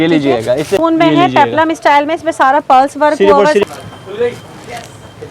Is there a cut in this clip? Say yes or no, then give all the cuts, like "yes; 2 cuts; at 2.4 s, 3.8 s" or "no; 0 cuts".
yes; 2 cuts; at 0.8 s, 3.6 s